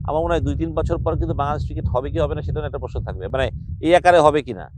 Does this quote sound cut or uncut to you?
uncut